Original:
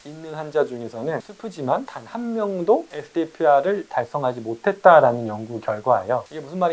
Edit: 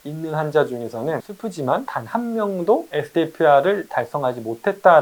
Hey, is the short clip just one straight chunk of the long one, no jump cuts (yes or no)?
yes